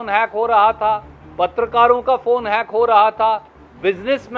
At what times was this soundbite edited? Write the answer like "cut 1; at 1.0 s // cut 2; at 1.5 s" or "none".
none